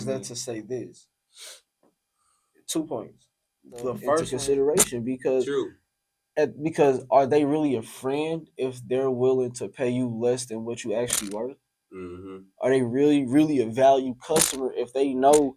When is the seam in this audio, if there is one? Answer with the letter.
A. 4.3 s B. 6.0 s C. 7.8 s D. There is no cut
A